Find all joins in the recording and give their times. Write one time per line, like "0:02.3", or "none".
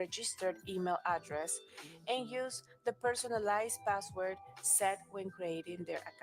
0:03.2